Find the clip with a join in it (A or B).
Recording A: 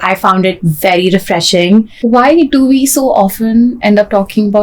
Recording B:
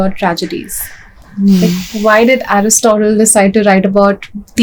A